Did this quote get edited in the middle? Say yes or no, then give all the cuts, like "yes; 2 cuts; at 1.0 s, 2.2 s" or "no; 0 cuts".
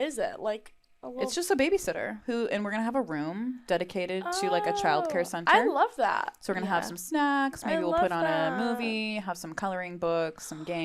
no; 0 cuts